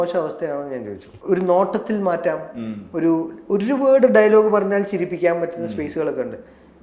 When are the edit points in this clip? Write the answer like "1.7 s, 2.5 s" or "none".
1.1 s

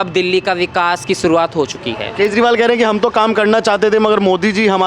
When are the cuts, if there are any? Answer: none

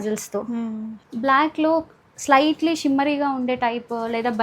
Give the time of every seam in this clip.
1.0 s

